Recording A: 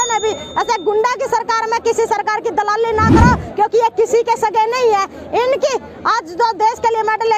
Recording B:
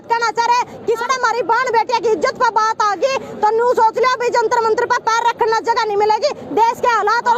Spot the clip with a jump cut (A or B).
B